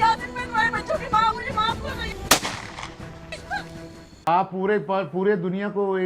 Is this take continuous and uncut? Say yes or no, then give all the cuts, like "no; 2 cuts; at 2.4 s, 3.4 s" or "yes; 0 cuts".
no; 1 cut; at 4.2 s